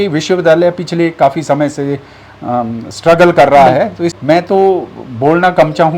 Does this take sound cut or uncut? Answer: cut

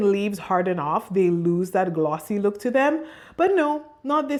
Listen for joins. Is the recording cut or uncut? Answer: uncut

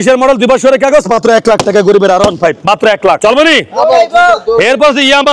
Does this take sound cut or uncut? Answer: uncut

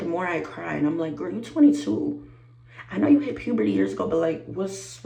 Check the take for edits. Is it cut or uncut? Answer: uncut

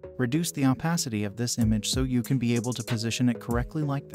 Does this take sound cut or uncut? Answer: uncut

